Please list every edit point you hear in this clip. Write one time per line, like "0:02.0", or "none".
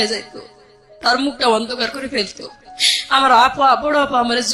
none